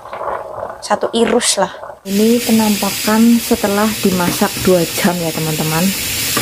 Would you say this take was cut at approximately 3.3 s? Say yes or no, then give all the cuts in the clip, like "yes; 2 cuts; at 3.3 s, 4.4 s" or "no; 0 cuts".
no; 1 cut; at 2.1 s